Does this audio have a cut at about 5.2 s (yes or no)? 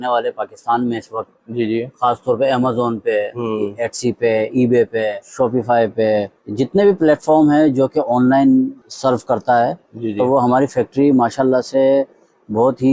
yes